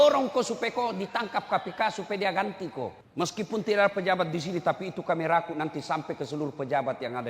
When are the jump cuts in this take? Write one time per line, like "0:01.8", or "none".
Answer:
0:03.0